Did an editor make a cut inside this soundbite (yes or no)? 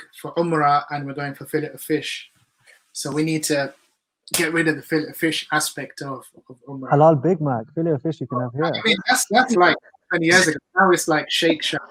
no